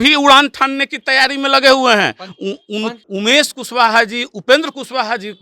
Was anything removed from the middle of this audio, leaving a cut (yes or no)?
yes